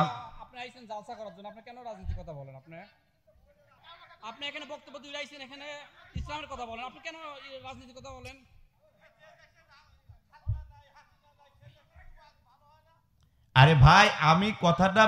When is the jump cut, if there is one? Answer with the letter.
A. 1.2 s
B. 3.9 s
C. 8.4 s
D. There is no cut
B